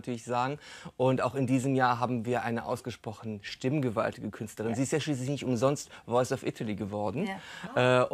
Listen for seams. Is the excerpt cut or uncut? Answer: cut